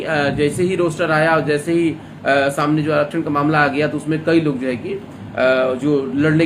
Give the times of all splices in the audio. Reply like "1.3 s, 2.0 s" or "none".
none